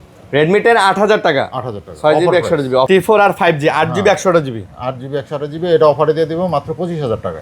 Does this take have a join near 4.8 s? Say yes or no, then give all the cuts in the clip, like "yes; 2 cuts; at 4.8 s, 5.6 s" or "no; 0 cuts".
no; 1 cut; at 2.9 s